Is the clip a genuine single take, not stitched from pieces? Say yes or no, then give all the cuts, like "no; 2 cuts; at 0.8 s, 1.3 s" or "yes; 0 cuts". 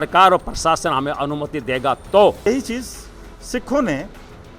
no; 1 cut; at 2.5 s